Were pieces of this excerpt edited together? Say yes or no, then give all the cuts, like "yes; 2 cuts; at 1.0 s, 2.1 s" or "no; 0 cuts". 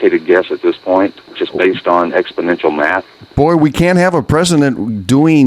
yes; 1 cut; at 1.2 s